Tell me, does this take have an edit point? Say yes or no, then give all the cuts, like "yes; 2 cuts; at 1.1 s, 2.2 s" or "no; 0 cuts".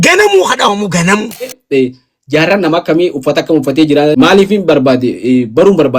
yes; 2 cuts; at 1.6 s, 4.1 s